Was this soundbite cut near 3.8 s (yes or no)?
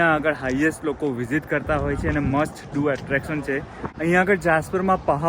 yes